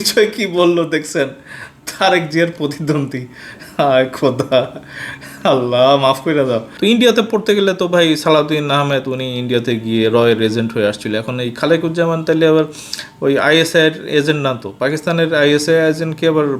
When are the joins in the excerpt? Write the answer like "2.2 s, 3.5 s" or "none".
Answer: 6.7 s